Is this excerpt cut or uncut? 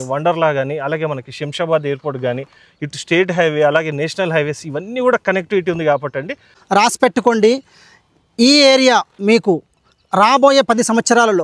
cut